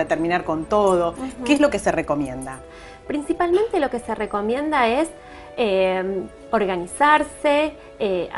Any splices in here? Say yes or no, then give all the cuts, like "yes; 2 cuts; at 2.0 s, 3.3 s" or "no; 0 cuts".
no; 0 cuts